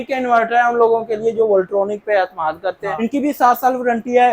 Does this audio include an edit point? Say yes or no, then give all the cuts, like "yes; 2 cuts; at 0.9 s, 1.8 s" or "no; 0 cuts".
yes; 1 cut; at 3.0 s